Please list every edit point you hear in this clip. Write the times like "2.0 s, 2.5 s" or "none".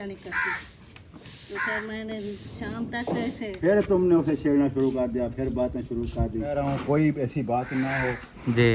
3.5 s, 6.6 s